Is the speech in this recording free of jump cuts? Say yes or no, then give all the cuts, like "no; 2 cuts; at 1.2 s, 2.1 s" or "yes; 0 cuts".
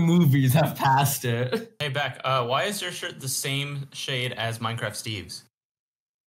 no; 1 cut; at 1.8 s